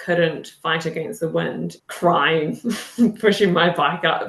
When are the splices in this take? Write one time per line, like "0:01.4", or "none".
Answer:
0:01.8

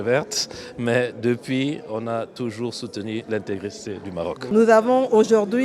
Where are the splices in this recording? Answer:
0:04.4

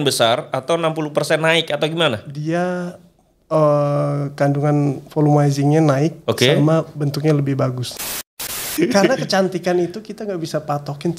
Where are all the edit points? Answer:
0:08.1

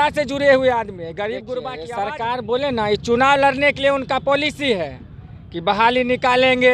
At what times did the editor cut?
0:01.8

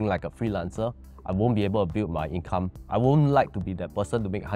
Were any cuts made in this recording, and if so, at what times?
0:02.7

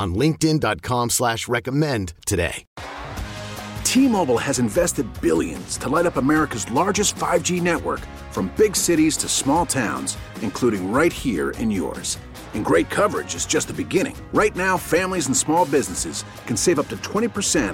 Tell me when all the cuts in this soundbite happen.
0:02.6

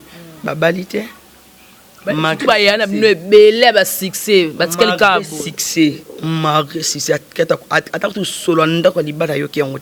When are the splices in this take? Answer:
none

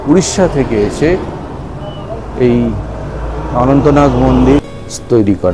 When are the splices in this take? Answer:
0:04.6

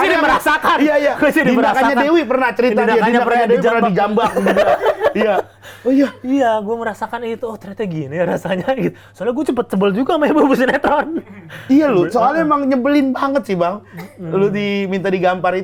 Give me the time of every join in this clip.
none

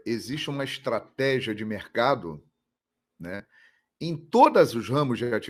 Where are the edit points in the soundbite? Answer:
none

